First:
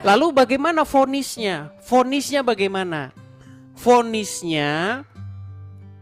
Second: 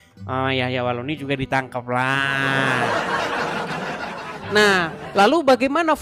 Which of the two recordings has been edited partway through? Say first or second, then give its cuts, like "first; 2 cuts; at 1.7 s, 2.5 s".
second; 1 cut; at 3.7 s